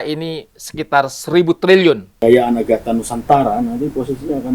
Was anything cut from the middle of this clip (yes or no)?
yes